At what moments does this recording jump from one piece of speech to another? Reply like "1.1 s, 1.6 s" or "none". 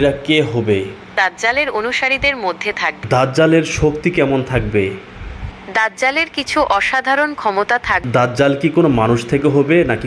1.1 s, 3.0 s, 8.0 s